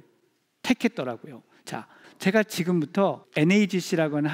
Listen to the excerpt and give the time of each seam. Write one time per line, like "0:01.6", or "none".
0:02.0
0:03.2